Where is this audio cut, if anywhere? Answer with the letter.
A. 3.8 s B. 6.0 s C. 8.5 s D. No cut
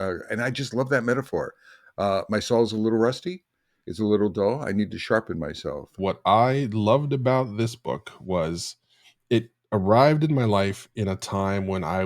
B